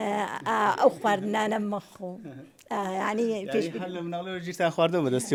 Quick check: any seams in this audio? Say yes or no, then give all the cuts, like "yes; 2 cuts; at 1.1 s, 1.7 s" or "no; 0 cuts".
no; 0 cuts